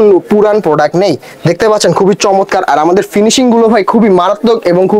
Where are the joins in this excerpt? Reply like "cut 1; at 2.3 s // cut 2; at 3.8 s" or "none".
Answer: none